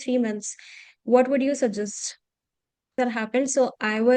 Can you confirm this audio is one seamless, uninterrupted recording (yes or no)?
no